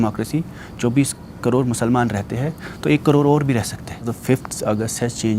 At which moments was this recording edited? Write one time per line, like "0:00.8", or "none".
0:04.1